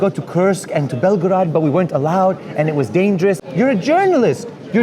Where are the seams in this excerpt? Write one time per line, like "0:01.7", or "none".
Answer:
0:03.4